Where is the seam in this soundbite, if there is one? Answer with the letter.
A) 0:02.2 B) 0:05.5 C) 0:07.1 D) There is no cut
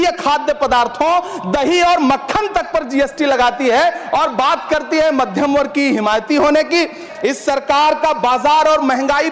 C